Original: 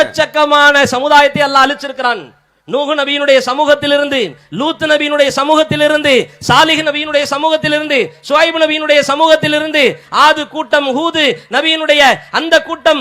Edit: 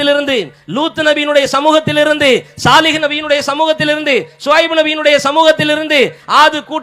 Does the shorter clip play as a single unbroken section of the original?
yes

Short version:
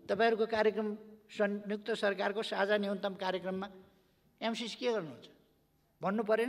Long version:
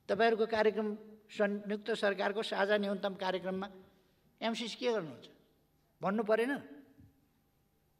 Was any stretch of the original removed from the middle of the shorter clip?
no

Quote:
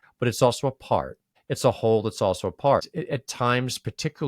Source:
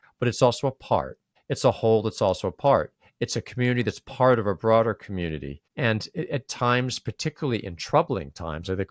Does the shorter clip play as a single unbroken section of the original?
no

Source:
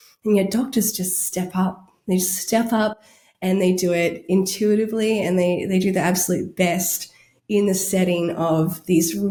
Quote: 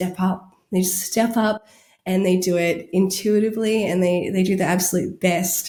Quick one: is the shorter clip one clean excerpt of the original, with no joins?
yes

